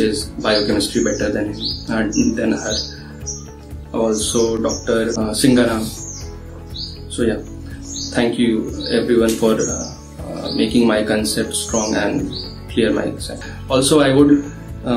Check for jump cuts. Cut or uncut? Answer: cut